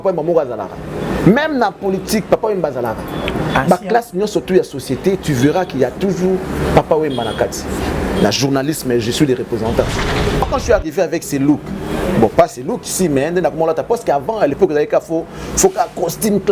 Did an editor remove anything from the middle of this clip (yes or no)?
yes